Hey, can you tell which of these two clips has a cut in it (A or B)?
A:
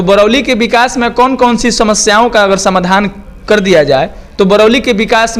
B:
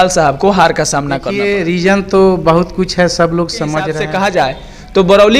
B